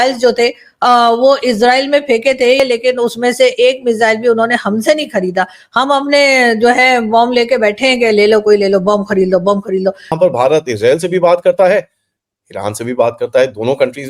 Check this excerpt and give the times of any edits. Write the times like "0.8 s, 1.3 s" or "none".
2.6 s, 10.1 s